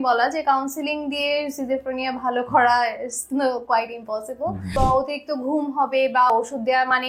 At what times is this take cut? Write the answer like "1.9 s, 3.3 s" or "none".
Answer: 4.7 s, 6.3 s